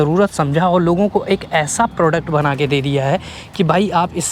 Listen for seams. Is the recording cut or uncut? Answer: uncut